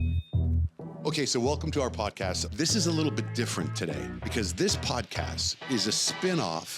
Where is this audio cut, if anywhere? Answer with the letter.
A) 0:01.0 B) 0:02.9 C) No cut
A